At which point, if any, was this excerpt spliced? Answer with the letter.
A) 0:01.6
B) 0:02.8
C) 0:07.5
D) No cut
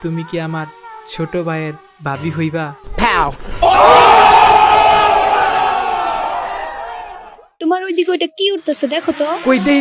C